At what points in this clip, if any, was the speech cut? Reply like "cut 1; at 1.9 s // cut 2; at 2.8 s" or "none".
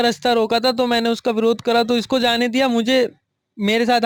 none

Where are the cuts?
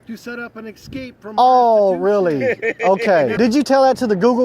cut 1; at 3.3 s

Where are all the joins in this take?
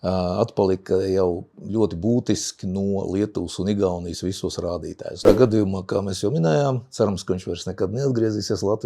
cut 1; at 5.2 s

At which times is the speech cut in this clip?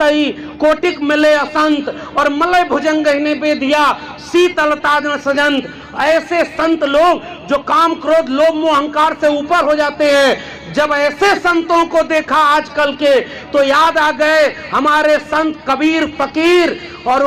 none

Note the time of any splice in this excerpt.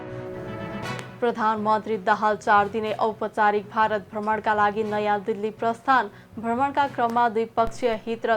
cut 1; at 1.1 s

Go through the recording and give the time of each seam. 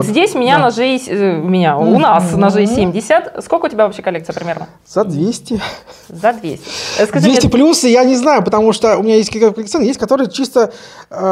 none

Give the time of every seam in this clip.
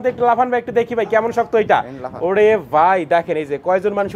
none

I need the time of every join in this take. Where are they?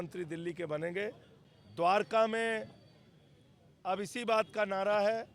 cut 1; at 1.3 s

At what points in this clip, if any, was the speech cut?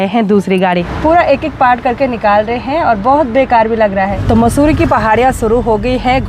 cut 1; at 0.9 s // cut 2; at 4.2 s

